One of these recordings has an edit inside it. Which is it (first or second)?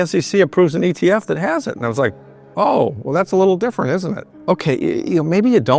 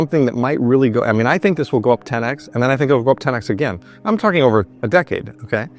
first